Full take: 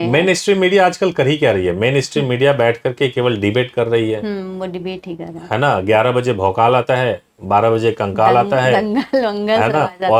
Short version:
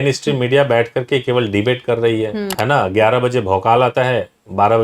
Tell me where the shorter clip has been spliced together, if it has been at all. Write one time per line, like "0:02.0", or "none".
0:02.5